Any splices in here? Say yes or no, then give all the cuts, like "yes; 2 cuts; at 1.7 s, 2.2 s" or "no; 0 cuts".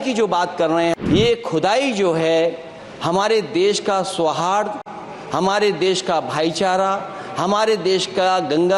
yes; 1 cut; at 1.0 s